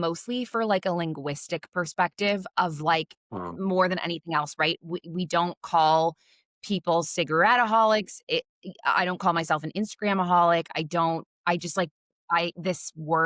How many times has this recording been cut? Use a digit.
0